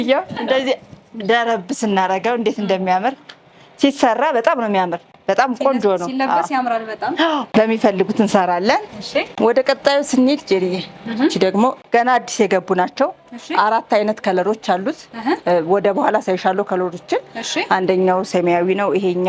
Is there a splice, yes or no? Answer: no